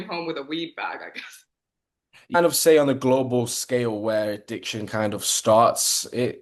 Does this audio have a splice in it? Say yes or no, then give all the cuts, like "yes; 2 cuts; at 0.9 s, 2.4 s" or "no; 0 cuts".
yes; 1 cut; at 2.4 s